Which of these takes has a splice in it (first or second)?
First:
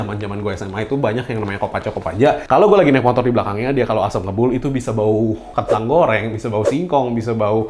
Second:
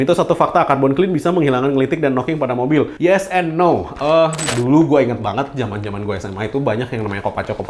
second